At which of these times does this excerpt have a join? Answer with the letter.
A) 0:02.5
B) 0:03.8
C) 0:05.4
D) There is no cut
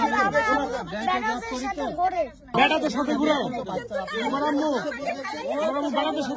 A